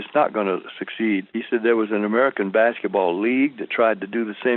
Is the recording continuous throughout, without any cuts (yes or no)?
no